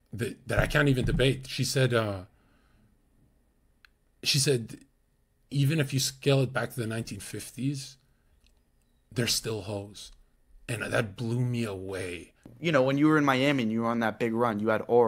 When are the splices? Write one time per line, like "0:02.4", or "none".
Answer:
0:12.5